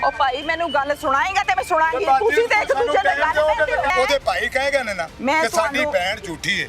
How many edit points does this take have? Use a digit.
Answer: 2